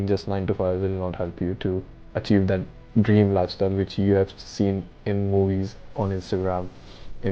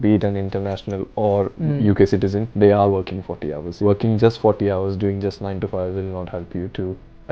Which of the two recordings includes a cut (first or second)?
second